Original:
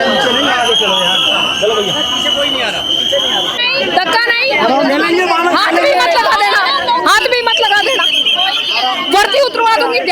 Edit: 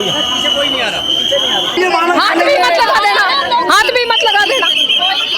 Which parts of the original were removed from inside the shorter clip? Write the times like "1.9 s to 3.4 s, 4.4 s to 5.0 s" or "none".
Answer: 3.6 s to 5.1 s